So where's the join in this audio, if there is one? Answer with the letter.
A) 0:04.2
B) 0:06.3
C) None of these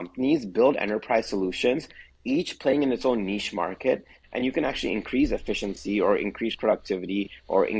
A